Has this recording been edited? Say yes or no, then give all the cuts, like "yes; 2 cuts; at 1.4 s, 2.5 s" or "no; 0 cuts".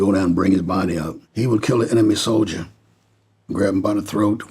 yes; 1 cut; at 1.2 s